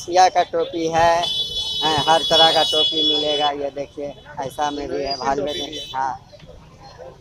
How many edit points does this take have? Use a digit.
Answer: 0